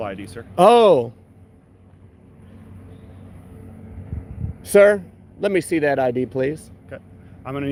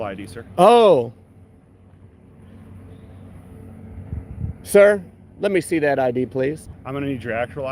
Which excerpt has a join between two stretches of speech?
second; 1 cut; at 6.7 s

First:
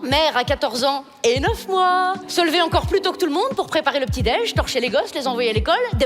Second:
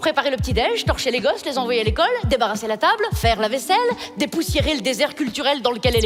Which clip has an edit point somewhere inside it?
first; 1 cut; at 2.2 s

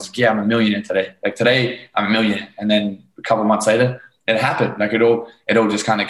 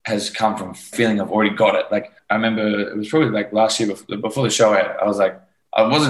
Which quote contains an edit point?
second; 2 cuts; at 0.9 s, 2.2 s

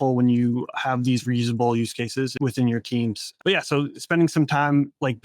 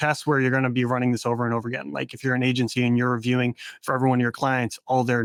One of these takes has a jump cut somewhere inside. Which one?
first; 2 cuts; at 2.3 s, 3.3 s

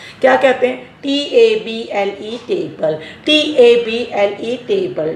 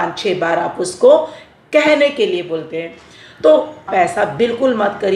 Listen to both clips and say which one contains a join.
second; 1 cut; at 3.9 s

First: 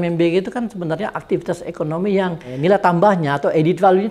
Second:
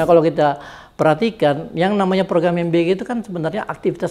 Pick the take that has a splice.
first; 1 cut; at 2.5 s

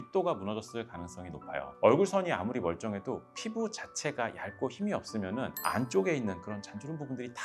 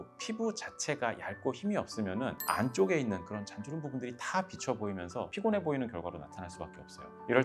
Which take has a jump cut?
first; 1 cut; at 1.7 s

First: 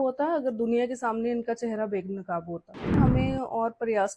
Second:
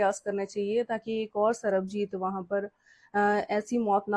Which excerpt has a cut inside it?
first; 1 cut; at 3.0 s

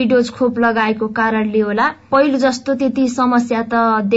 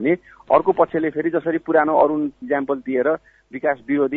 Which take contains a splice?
second; 1 cut; at 2.0 s

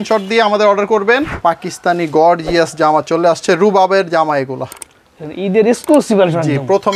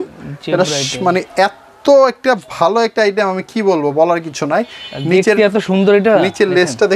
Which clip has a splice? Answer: first; 1 cut; at 1.3 s

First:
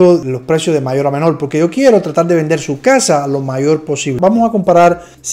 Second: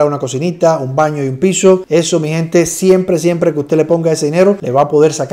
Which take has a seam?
first; 1 cut; at 4.2 s

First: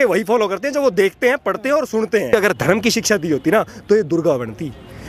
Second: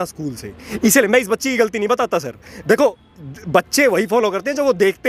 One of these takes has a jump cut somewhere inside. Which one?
first; 1 cut; at 2.3 s

